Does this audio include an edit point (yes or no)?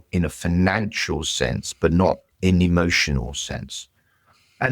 yes